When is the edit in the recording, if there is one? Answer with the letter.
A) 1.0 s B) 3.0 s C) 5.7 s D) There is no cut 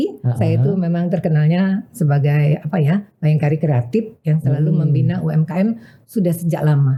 D